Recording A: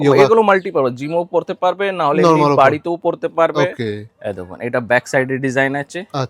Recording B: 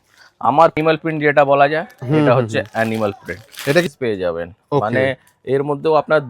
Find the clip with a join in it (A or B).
B